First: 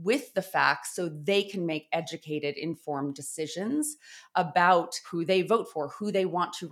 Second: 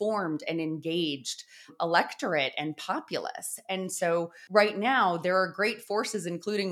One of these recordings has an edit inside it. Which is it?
second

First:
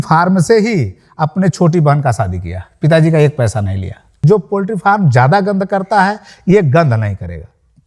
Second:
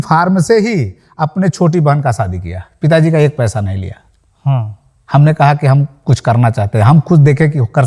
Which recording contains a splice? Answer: first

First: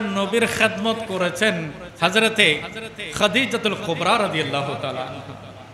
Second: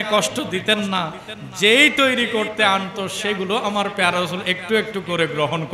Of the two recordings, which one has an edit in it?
first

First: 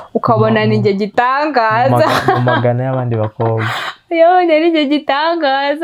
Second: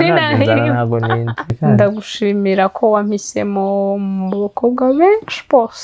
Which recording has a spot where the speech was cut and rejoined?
second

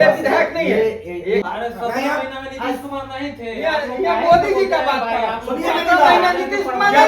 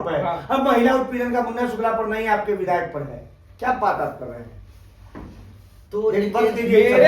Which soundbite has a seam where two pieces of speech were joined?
first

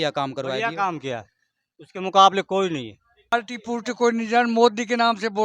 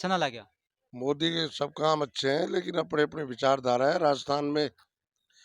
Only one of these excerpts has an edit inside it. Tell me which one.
first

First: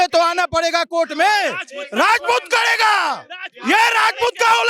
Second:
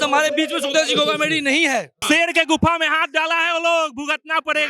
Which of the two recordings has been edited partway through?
second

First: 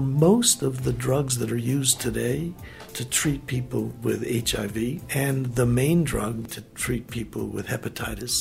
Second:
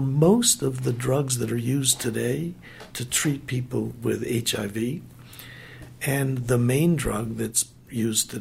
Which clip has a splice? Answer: first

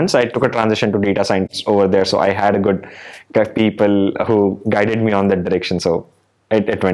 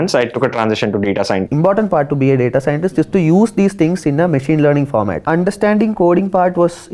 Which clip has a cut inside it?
second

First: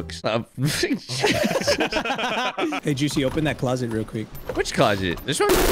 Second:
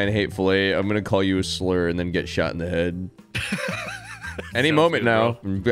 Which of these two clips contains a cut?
first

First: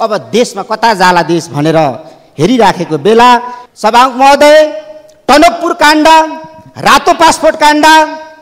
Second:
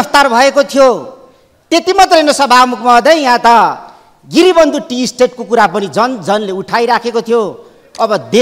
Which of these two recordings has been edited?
first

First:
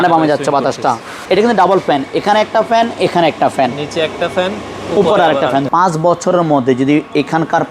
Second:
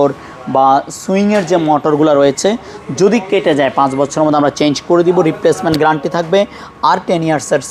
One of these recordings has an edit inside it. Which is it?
first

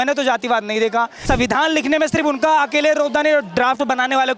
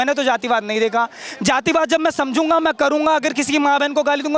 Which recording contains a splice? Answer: first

